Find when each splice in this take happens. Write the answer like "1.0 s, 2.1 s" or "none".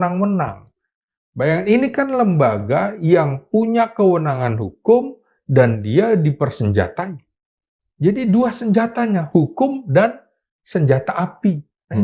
none

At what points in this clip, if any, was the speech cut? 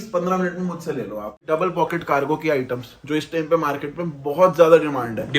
1.5 s

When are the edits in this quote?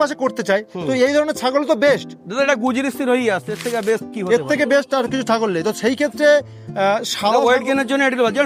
none

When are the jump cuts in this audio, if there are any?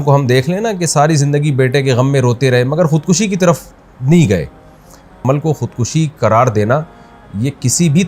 5.2 s

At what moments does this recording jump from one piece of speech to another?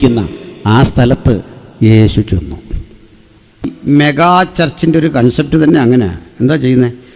3.7 s

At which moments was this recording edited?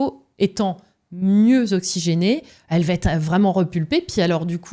none

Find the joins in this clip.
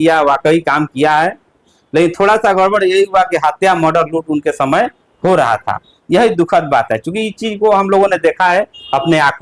none

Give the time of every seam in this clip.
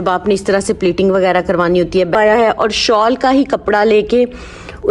2.2 s

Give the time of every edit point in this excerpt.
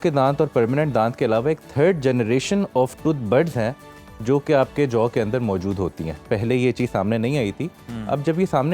none

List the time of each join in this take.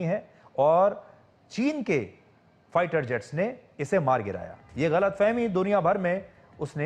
none

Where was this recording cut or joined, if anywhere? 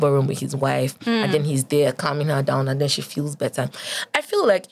none

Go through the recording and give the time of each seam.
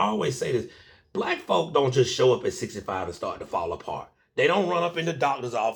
none

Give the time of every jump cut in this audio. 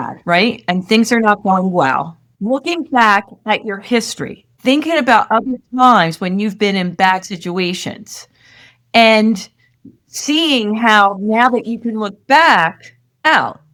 none

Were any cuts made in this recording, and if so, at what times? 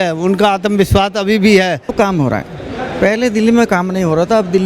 1.9 s

